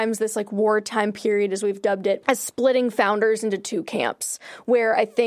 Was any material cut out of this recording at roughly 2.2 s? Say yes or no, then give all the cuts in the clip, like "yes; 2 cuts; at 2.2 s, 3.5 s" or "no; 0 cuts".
yes; 1 cut; at 2.2 s